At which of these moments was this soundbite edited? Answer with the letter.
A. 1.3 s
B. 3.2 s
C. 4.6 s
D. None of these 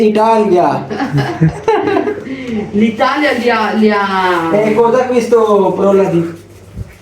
A